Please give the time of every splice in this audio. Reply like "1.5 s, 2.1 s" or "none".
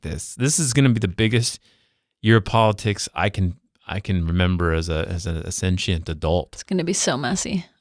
6.6 s